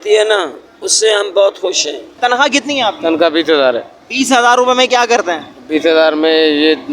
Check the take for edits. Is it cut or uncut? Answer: cut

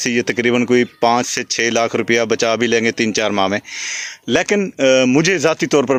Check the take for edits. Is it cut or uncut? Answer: uncut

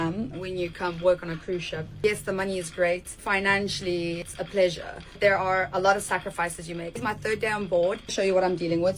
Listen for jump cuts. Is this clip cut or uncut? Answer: uncut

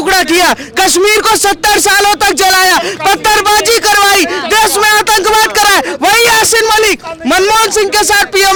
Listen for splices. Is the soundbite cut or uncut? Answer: uncut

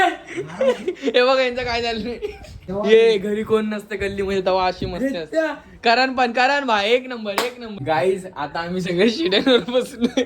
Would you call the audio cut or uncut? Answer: cut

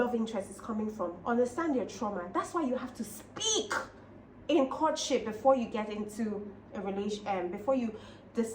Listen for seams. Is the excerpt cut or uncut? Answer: uncut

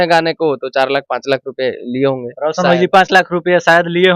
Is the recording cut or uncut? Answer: uncut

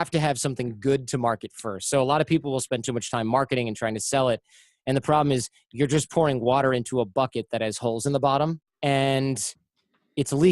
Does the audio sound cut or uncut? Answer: cut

